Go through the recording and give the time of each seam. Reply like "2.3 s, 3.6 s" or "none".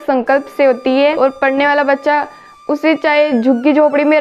1.2 s